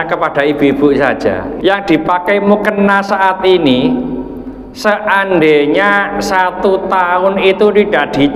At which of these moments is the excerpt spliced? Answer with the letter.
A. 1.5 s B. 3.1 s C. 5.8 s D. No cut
A